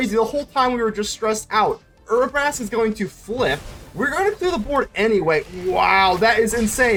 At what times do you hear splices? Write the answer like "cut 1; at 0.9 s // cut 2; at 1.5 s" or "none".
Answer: none